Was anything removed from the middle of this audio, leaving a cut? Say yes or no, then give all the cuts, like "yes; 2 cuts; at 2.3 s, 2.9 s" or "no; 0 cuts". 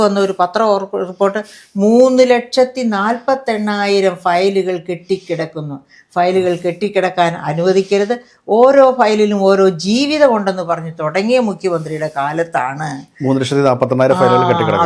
no; 0 cuts